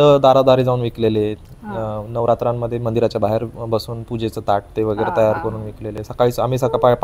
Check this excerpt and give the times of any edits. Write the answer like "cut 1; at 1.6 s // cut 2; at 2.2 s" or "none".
none